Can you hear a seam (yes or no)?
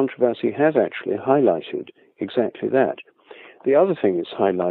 no